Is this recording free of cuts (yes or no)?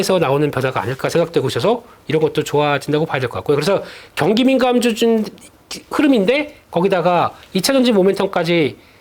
yes